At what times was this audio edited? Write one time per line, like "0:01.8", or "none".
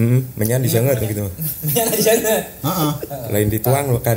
none